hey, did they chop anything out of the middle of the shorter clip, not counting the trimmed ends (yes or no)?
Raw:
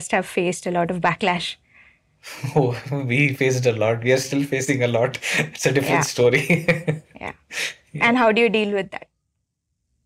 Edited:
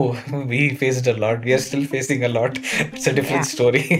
no